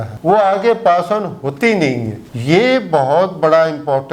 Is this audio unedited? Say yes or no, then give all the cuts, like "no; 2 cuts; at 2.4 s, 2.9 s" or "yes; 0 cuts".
yes; 0 cuts